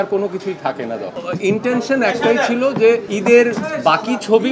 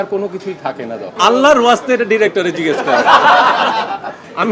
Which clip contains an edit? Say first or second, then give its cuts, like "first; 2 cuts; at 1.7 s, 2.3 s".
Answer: first; 2 cuts; at 1.1 s, 3.1 s